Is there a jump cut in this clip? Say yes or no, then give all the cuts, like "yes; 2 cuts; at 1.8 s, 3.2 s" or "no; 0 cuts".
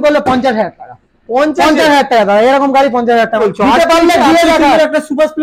yes; 1 cut; at 3.4 s